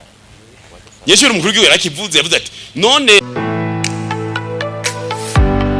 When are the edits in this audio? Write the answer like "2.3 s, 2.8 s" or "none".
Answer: 3.3 s